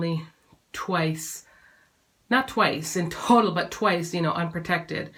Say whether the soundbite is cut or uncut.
uncut